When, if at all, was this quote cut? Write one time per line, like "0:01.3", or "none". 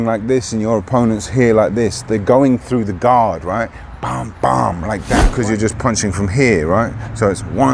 0:05.3